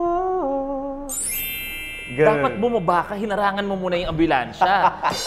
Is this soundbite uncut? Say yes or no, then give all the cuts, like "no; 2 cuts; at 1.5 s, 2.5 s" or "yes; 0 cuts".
yes; 0 cuts